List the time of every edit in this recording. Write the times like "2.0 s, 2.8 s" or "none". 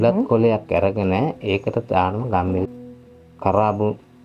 2.7 s